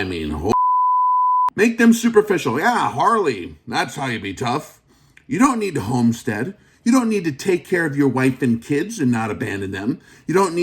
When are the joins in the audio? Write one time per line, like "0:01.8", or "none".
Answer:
0:01.5